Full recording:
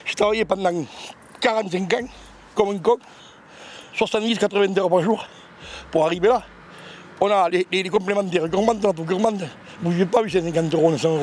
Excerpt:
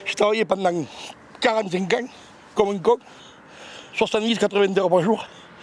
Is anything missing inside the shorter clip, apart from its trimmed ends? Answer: no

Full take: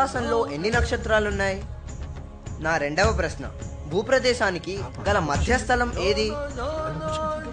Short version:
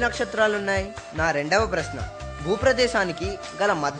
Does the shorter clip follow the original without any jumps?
no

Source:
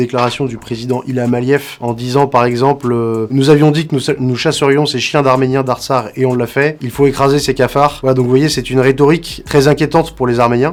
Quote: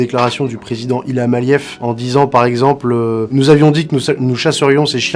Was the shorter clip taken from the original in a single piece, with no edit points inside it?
yes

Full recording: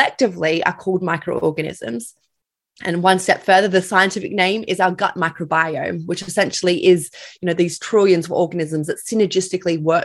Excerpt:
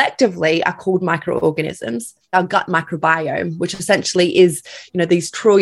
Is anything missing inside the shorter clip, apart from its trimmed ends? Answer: yes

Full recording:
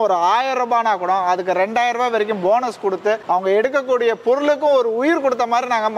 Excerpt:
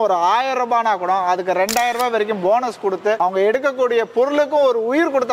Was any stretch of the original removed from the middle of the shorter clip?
yes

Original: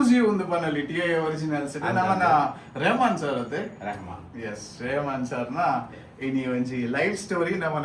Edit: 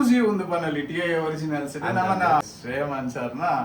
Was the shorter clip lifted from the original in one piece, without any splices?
no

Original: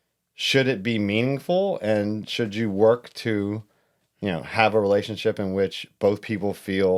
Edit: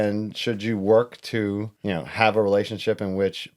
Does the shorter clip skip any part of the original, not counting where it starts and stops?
yes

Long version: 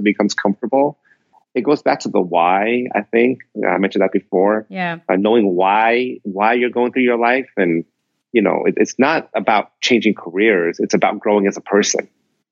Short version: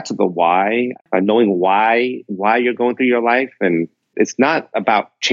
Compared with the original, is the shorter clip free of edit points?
no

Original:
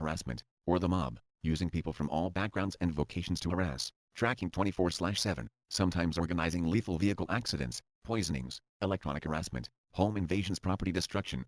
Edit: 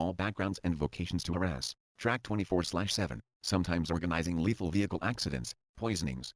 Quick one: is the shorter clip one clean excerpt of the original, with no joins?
no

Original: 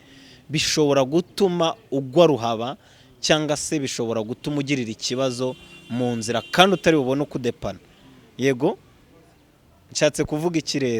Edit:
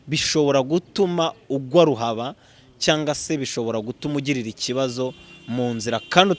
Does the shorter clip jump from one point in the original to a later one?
no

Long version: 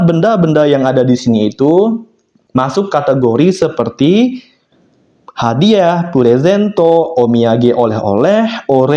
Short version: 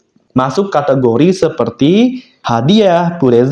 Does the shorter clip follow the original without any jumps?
no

